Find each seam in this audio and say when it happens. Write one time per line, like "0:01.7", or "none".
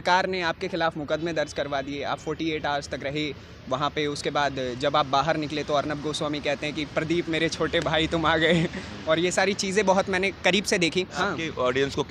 0:11.2